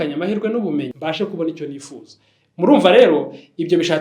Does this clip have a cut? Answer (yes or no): yes